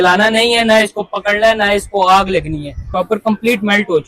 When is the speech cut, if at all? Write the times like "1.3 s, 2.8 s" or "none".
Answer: 2.7 s